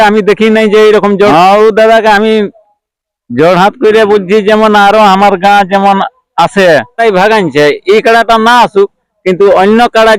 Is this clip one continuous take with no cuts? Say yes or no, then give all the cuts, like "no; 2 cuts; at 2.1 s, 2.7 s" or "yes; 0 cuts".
no; 2 cuts; at 1.3 s, 7.0 s